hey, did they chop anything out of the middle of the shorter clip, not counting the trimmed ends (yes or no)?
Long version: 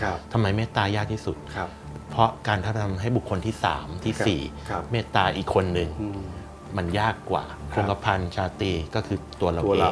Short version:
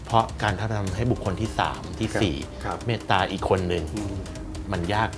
no